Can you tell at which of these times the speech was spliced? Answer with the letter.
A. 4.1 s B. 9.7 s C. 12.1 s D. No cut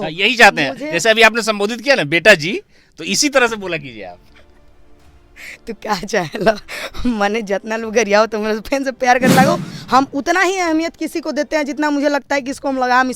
B